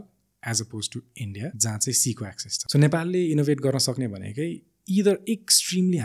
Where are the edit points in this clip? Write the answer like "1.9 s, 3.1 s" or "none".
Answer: 1.6 s, 2.5 s